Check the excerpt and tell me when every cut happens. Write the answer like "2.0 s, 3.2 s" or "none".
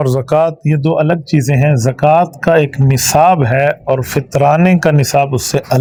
none